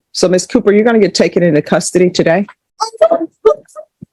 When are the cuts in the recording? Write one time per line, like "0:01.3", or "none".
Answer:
none